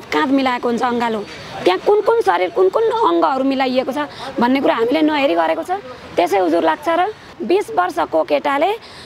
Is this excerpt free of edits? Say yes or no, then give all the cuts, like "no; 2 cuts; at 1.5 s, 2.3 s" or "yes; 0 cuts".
no; 1 cut; at 7.3 s